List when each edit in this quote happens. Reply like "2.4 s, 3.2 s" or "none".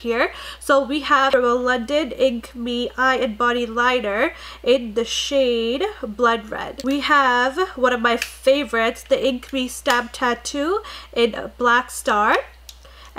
1.3 s